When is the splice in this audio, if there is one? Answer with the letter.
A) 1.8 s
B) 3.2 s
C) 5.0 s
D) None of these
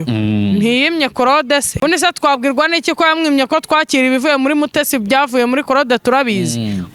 A